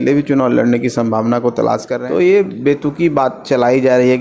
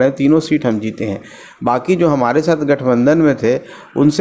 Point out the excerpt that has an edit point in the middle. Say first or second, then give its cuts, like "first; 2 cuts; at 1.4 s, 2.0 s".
first; 1 cut; at 1.9 s